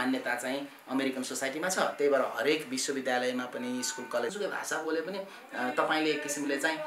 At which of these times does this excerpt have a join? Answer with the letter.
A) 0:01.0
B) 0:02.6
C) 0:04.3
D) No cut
C